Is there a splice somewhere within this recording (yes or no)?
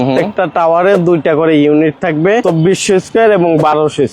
yes